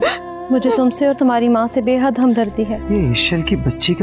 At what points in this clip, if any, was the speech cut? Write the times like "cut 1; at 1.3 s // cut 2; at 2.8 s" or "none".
cut 1; at 2.8 s